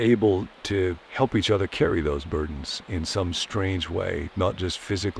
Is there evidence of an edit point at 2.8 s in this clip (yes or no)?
no